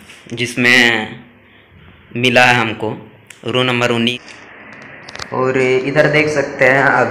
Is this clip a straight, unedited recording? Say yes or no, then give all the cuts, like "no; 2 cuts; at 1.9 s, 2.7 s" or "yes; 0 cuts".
no; 1 cut; at 4.1 s